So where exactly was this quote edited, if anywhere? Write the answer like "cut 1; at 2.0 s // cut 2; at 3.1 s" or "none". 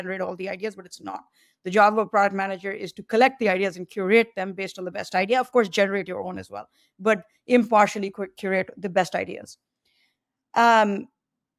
none